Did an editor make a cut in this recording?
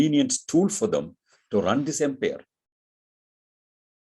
no; 0 cuts

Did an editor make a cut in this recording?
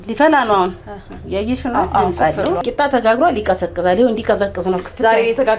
yes; 1 cut; at 2.6 s

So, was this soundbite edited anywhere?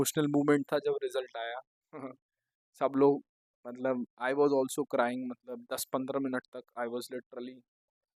no; 0 cuts

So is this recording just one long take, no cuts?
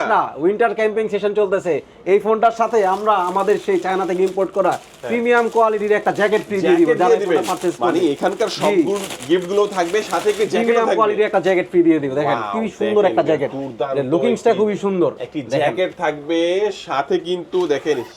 yes; 0 cuts

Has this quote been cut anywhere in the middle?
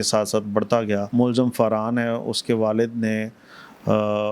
yes; 1 cut; at 1.1 s

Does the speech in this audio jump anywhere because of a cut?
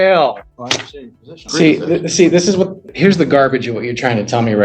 yes; 2 cuts; at 1.4 s, 2.8 s

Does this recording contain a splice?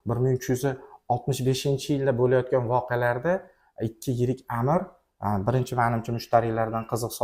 no; 0 cuts

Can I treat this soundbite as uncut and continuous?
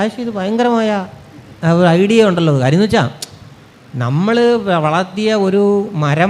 yes; 0 cuts

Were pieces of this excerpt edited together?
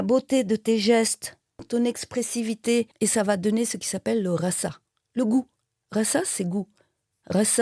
yes; 1 cut; at 1.7 s

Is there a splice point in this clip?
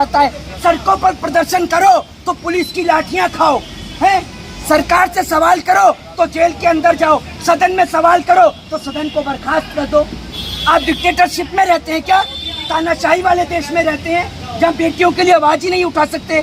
no; 0 cuts

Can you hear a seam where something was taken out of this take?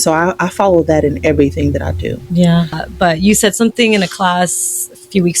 yes; 1 cut; at 2.8 s

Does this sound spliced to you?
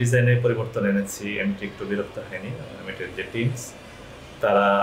no; 0 cuts

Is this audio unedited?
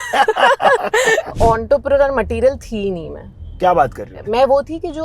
no; 2 cuts; at 1.4 s, 4.1 s

